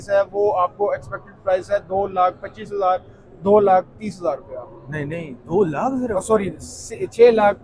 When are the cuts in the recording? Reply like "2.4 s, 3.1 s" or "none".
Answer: none